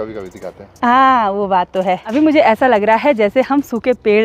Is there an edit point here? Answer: yes; 1 cut; at 2.0 s

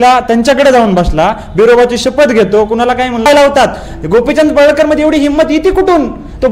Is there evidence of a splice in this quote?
yes; 1 cut; at 3.3 s

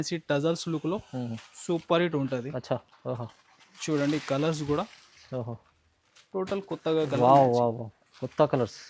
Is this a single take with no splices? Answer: yes; 0 cuts

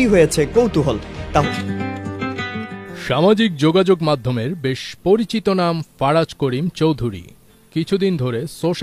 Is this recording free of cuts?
no; 1 cut; at 1.4 s

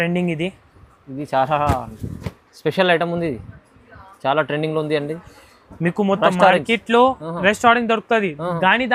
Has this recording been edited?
no; 0 cuts

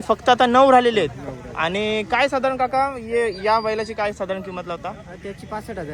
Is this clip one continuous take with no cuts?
yes; 0 cuts

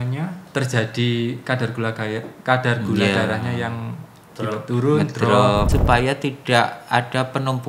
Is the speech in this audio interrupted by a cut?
yes; 1 cut; at 5.7 s

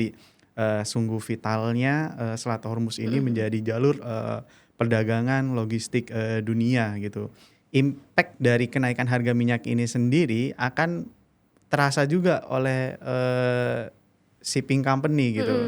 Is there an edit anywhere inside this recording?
yes; 1 cut; at 7.4 s

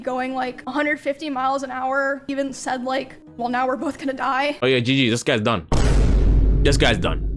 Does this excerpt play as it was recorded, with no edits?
no; 3 cuts; at 2.3 s, 3.2 s, 4.6 s

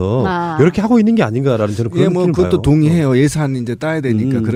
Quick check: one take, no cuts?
yes; 0 cuts

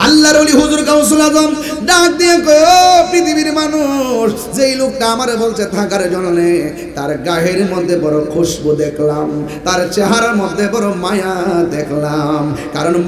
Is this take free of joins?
yes; 0 cuts

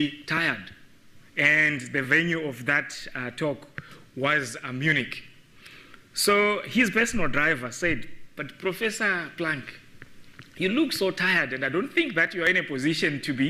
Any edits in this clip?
no; 0 cuts

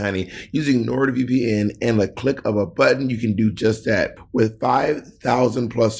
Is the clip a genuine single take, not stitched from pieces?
no; 1 cut; at 4.2 s

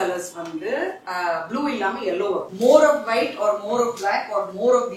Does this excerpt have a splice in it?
yes; 2 cuts; at 1.0 s, 2.5 s

